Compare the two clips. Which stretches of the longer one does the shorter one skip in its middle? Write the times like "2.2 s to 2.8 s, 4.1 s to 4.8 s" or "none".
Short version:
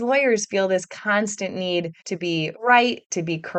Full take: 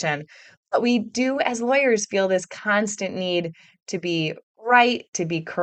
3.9 s to 4.3 s